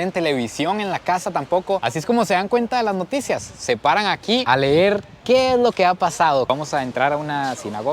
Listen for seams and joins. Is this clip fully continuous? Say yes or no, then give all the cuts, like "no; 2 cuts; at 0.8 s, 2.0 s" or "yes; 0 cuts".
no; 1 cut; at 6.5 s